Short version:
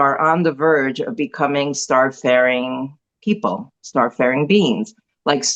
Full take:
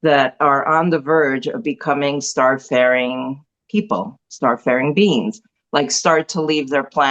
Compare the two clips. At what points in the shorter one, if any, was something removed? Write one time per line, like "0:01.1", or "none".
none